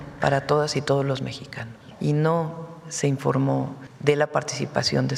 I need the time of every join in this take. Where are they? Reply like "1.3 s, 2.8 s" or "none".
1.8 s, 3.9 s